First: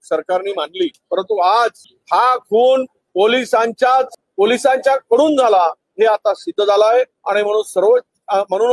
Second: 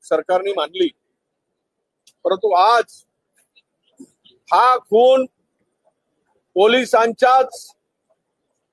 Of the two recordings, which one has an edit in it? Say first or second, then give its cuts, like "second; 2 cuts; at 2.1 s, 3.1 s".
first; 6 cuts; at 1.0 s, 1.9 s, 3.0 s, 4.2 s, 5.8 s, 7.2 s